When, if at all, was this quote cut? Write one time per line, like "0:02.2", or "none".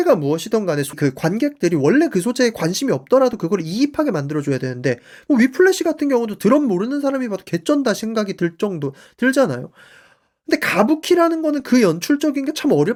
none